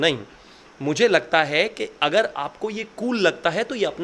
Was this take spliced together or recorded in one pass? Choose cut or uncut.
uncut